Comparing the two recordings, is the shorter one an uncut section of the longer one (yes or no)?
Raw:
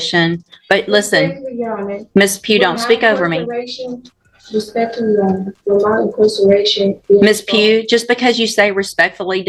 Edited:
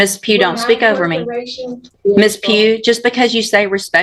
no